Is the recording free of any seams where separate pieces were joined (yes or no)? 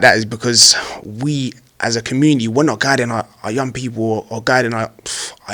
yes